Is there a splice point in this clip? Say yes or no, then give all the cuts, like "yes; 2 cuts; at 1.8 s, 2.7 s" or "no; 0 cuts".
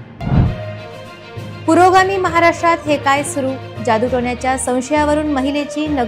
no; 0 cuts